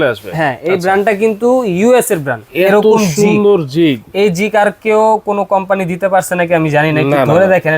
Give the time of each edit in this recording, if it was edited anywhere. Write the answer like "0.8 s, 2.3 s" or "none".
2.4 s